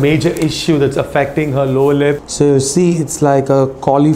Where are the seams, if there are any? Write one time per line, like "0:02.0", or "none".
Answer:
0:02.3